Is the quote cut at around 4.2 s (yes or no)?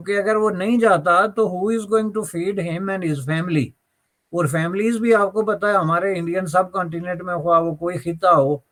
no